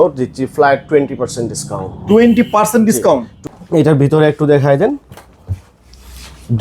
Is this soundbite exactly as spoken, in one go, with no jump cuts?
no; 1 cut; at 3.3 s

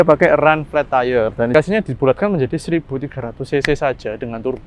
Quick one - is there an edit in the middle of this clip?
yes; 1 cut; at 1.5 s

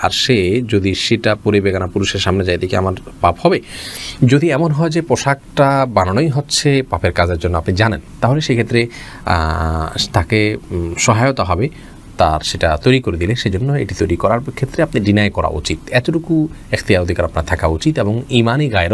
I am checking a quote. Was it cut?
no; 0 cuts

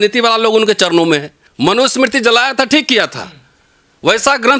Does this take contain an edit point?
yes; 1 cut; at 1.4 s

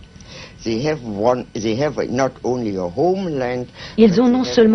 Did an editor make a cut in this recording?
no; 0 cuts

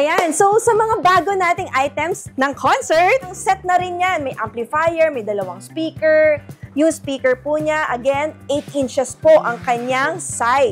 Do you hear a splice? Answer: yes; 2 cuts; at 2.2 s, 3.3 s

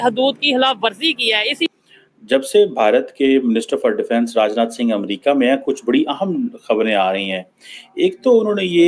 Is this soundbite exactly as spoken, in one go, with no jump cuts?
no; 1 cut; at 1.7 s

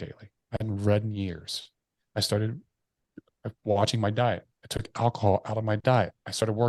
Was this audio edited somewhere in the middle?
no; 0 cuts

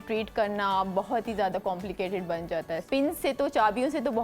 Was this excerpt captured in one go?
no; 1 cut; at 2.9 s

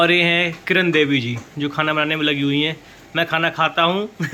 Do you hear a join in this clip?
no; 0 cuts

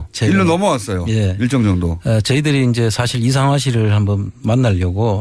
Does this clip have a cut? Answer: no; 0 cuts

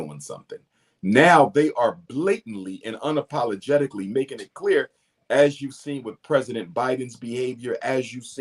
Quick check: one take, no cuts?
yes; 0 cuts

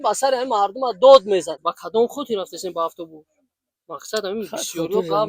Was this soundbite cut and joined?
yes; 1 cut; at 1.6 s

